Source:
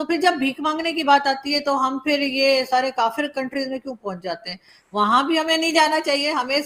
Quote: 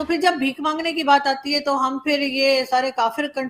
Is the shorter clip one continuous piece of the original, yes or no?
yes